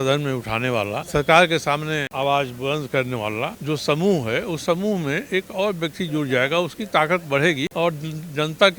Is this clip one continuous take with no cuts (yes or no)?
no